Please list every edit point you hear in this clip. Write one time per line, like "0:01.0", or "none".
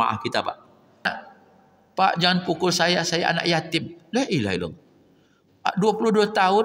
0:01.2